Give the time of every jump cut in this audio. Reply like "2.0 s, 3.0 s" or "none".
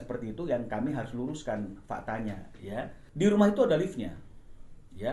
3.0 s